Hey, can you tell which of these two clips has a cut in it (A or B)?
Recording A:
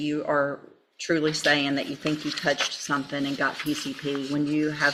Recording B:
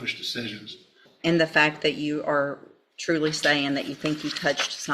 B